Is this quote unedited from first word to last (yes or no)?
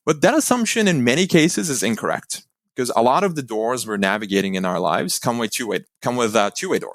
yes